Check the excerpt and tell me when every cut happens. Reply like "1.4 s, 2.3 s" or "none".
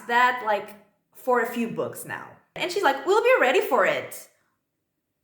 2.6 s

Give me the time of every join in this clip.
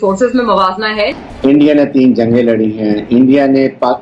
1.1 s

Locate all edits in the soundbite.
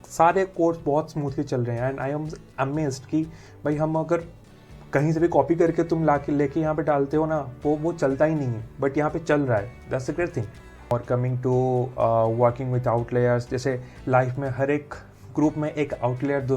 10.9 s

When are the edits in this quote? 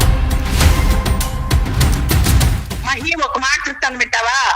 2.3 s

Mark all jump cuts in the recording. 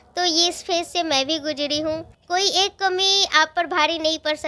2.1 s

